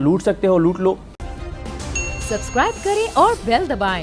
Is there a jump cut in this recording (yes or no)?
yes